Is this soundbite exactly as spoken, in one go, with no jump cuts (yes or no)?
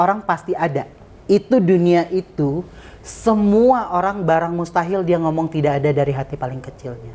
yes